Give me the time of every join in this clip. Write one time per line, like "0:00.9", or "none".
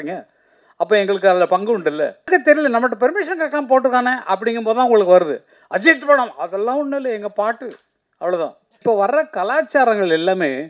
0:02.3
0:08.8

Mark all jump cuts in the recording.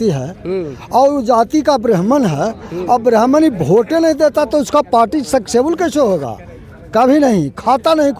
none

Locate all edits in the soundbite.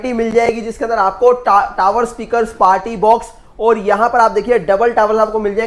none

